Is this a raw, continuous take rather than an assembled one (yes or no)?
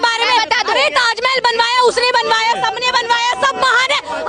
yes